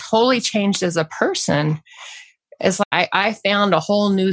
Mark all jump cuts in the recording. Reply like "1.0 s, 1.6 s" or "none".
2.8 s